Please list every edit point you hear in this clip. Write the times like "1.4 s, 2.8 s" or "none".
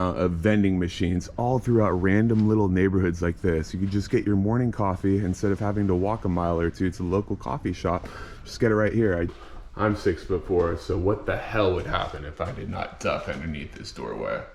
9.3 s